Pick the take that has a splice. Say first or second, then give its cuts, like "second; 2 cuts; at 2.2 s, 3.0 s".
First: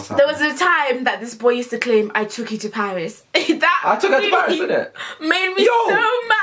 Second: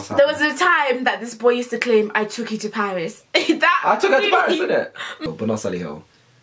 second; 1 cut; at 5.2 s